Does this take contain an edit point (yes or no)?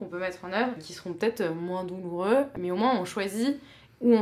yes